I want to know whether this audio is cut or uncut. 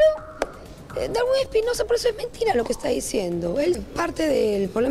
cut